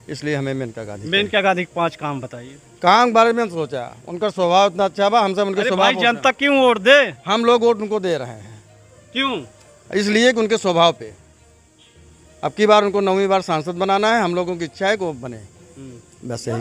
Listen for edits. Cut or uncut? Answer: uncut